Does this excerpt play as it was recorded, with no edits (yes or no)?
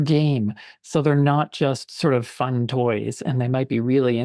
yes